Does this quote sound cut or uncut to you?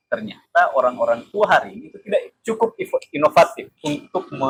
uncut